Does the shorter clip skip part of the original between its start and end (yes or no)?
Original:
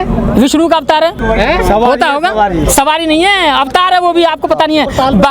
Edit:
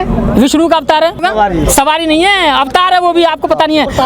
yes